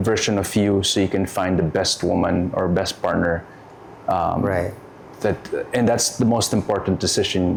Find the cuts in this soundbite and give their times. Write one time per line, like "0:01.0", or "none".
none